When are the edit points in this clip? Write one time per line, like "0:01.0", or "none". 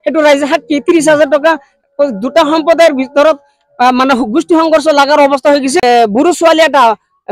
0:05.8